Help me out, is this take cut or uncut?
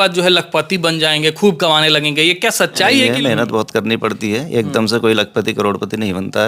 cut